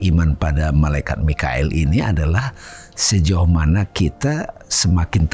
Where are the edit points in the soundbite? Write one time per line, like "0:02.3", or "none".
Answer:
none